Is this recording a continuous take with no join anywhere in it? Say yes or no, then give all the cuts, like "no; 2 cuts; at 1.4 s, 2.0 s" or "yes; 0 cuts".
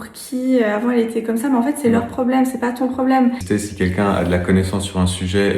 no; 1 cut; at 3.4 s